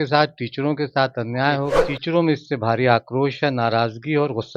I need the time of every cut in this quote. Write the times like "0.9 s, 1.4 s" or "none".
1.9 s